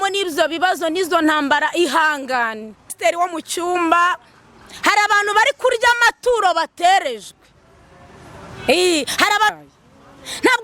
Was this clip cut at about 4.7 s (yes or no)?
no